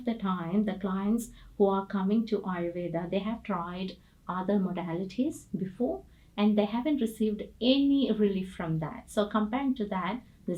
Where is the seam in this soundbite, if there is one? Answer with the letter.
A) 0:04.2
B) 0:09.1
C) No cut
C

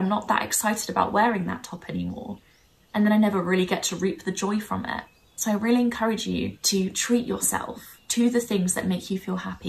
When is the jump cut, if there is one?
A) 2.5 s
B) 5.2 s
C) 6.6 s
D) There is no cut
C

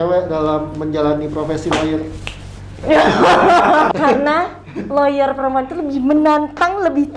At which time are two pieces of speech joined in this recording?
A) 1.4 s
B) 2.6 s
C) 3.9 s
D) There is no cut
C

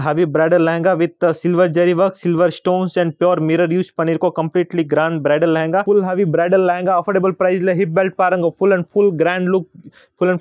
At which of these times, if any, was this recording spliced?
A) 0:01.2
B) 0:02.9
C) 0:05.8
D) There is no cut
C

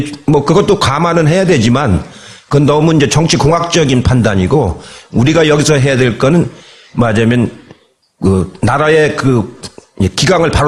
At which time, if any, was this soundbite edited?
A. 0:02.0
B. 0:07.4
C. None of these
A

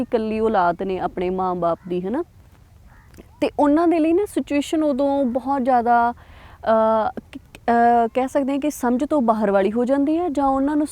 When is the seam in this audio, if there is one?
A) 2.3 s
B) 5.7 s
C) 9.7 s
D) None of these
D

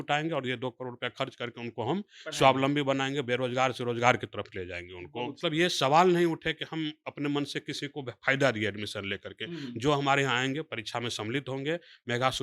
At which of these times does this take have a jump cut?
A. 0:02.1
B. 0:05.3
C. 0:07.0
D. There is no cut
B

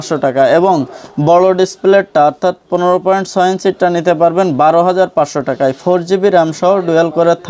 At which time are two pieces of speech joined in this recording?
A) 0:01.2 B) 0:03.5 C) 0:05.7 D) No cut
D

